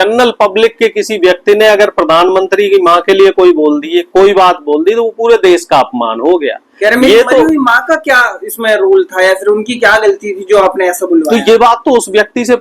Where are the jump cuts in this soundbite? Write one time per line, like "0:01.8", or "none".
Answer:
none